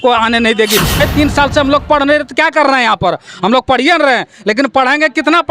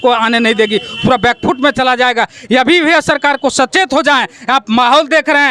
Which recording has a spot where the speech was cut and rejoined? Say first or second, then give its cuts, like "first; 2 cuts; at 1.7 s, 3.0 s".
first; 1 cut; at 1.0 s